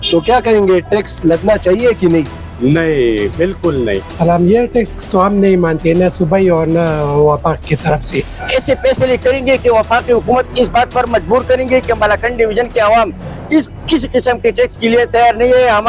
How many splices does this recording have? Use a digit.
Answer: 2